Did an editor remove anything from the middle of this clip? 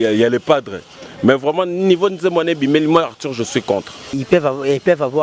yes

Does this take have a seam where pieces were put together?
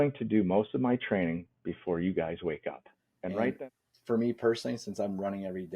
yes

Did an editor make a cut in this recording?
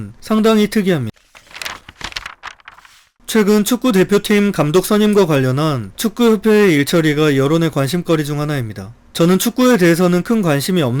no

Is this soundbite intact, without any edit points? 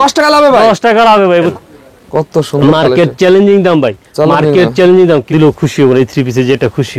no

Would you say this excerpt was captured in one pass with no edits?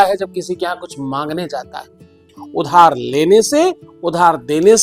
no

